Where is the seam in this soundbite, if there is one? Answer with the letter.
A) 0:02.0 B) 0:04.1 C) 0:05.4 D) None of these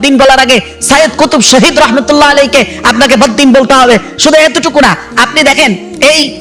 D